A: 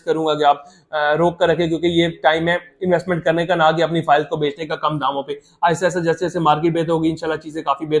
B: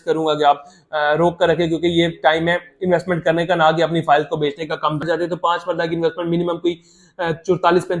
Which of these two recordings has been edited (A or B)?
B